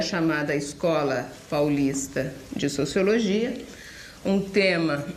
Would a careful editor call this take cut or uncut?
uncut